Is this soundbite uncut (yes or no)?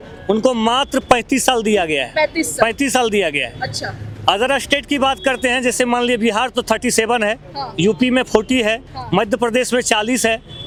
yes